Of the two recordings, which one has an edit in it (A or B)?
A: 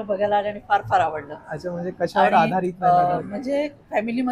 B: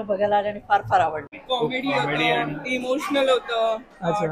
B